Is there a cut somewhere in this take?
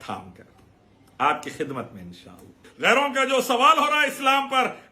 yes; 1 cut; at 2.7 s

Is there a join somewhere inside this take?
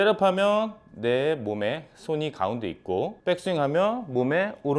no; 0 cuts

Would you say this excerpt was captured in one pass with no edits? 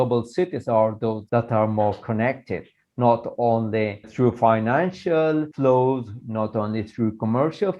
no; 2 cuts; at 1.2 s, 4.0 s

